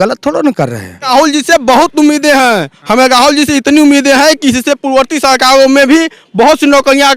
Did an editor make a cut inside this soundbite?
yes; 1 cut; at 1.1 s

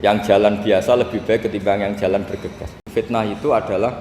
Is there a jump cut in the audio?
yes; 1 cut; at 2.8 s

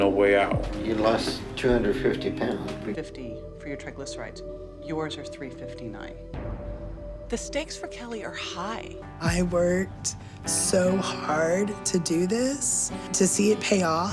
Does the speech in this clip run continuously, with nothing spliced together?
no; 2 cuts; at 3.0 s, 9.0 s

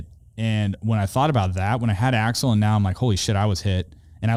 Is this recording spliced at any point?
no; 0 cuts

